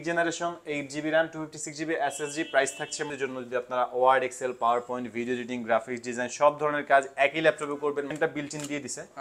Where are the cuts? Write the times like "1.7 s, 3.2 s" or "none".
3.0 s, 8.1 s